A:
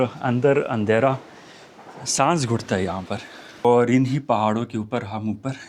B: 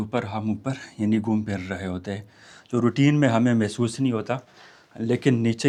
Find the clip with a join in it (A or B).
A